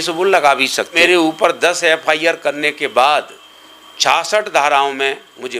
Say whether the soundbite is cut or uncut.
cut